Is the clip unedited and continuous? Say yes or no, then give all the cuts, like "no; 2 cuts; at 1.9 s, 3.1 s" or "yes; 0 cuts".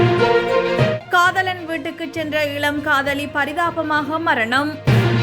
no; 1 cut; at 1.0 s